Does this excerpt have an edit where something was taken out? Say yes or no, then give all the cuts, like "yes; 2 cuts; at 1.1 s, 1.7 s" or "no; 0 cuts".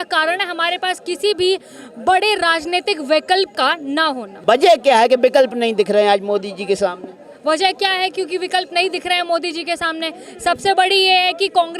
no; 0 cuts